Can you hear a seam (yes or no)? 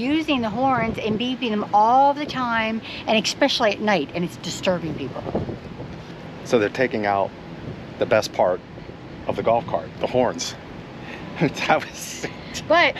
no